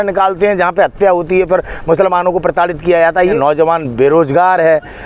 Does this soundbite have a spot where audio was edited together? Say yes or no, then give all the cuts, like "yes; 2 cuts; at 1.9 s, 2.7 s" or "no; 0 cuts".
yes; 1 cut; at 3.4 s